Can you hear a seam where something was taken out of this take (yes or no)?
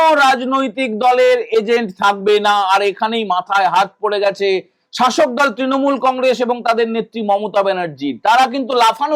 no